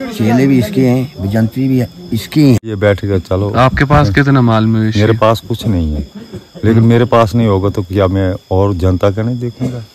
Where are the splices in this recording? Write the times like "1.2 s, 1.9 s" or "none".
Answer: 2.8 s